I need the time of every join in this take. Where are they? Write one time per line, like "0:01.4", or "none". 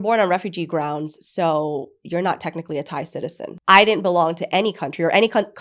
0:03.5